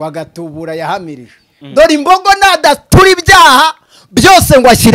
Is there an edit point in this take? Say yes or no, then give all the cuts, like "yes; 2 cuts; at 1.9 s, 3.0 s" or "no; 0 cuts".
yes; 1 cut; at 1.5 s